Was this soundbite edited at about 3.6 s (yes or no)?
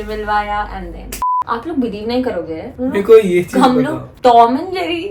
no